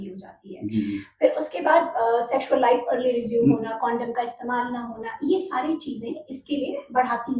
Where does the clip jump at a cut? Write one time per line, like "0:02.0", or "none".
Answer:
none